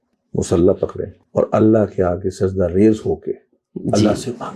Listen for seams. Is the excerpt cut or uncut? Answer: uncut